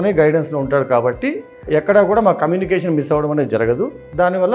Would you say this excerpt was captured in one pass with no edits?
no; 1 cut; at 1.6 s

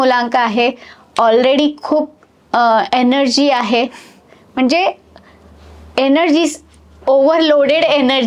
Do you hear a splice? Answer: no; 0 cuts

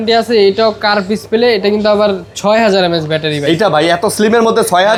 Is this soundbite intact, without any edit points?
yes; 0 cuts

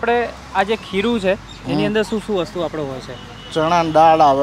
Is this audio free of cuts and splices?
yes; 0 cuts

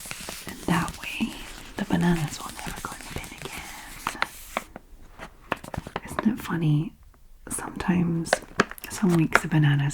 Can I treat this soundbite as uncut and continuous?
yes; 0 cuts

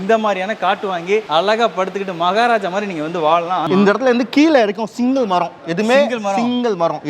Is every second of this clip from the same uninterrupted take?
no; 2 cuts; at 1.3 s, 3.6 s

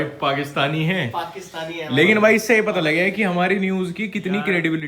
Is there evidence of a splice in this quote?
no; 0 cuts

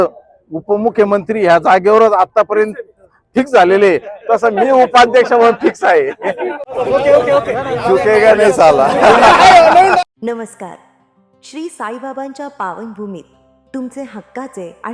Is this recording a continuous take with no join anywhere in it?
yes; 0 cuts

